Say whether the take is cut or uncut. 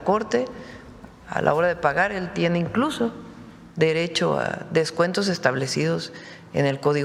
uncut